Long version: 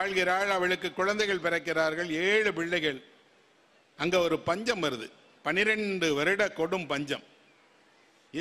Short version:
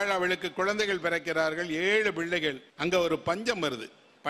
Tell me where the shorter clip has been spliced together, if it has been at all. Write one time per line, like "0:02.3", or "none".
0:02.7

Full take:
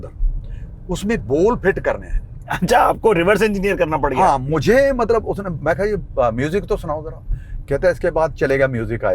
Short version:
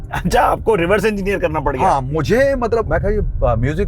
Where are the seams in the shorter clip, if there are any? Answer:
0:02.9

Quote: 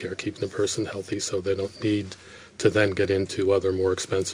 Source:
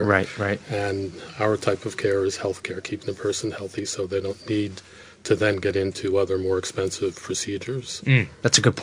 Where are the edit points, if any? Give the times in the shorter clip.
none

